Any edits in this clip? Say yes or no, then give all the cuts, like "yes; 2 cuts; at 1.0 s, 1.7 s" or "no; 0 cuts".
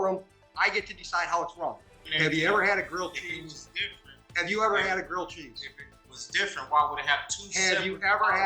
yes; 1 cut; at 2.1 s